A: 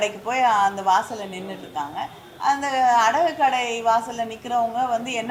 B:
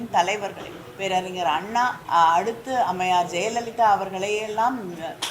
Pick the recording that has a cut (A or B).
B